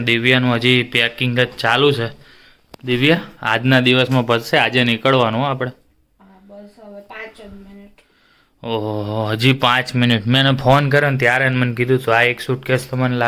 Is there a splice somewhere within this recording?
no; 0 cuts

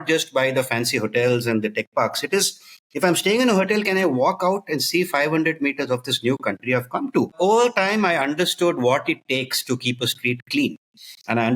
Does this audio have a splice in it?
yes; 1 cut; at 7.3 s

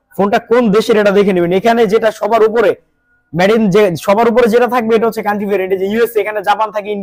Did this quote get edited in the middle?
no; 0 cuts

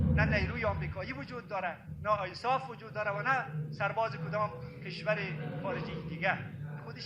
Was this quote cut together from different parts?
no; 0 cuts

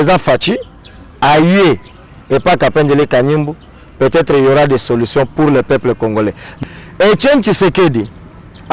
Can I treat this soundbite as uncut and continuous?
no; 1 cut; at 6.5 s

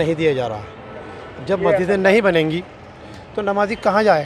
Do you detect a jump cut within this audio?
no; 0 cuts

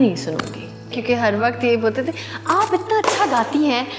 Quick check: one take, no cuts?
no; 1 cut; at 1.0 s

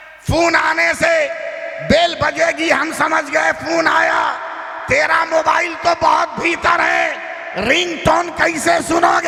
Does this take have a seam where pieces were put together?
no; 0 cuts

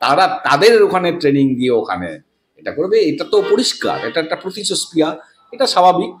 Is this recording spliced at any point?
no; 0 cuts

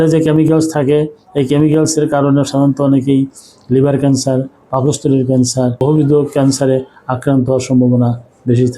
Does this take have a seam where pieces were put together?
yes; 1 cut; at 5.8 s

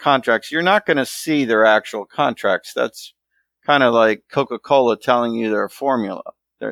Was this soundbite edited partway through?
no; 0 cuts

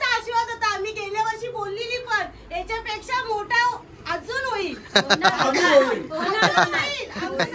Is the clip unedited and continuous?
yes; 0 cuts

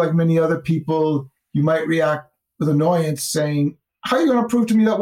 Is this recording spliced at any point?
yes; 2 cuts; at 1.4 s, 3.9 s

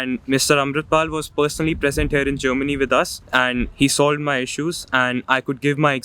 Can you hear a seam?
yes; 1 cut; at 3.2 s

